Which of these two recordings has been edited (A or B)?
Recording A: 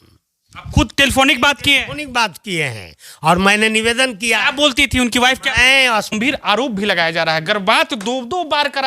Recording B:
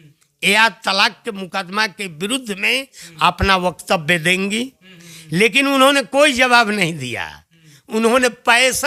A